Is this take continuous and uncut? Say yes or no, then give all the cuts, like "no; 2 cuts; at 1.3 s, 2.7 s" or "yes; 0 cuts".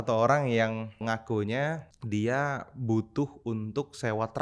no; 2 cuts; at 1.0 s, 1.9 s